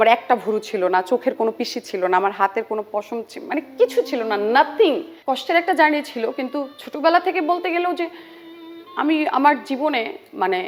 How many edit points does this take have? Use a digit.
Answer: 1